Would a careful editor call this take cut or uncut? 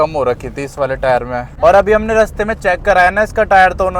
cut